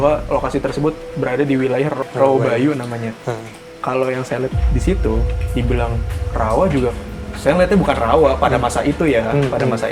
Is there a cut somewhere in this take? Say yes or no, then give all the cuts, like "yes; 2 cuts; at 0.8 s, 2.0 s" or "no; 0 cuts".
yes; 1 cut; at 2.0 s